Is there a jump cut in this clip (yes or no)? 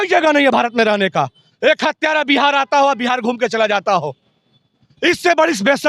yes